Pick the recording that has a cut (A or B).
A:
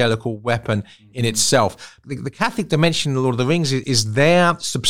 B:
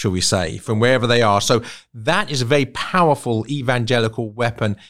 A